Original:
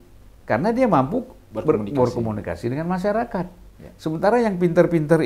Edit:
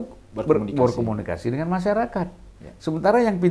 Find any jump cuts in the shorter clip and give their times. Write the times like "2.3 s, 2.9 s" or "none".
none